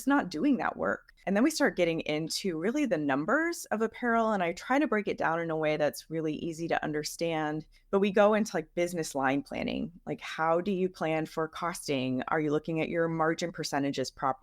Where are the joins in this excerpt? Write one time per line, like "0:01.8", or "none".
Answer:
0:01.1
0:07.7